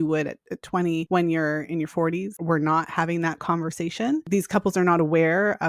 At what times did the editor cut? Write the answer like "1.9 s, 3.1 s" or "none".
1.1 s, 2.4 s, 4.2 s